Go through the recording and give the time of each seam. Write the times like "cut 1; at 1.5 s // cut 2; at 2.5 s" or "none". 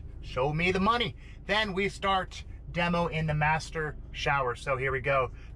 none